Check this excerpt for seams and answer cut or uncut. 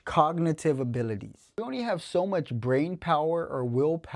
cut